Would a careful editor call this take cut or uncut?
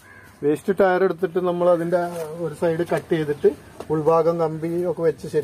uncut